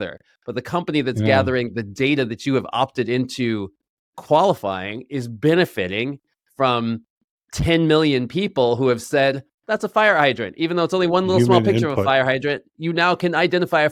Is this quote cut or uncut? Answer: uncut